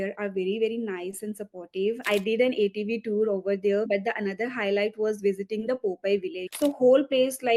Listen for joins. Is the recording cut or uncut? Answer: cut